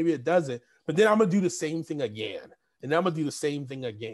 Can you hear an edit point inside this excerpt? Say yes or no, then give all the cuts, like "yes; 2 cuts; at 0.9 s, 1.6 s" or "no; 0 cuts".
no; 0 cuts